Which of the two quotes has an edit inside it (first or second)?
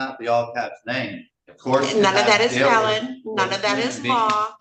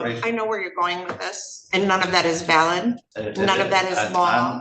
second